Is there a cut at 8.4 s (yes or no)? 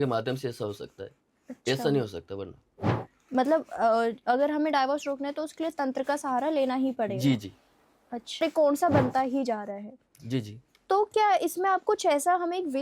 yes